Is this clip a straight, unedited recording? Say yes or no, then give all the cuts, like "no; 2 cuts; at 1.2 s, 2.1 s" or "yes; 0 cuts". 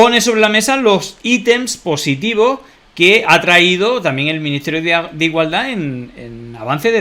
yes; 0 cuts